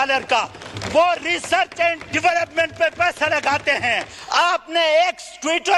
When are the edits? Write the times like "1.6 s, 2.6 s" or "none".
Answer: 4.2 s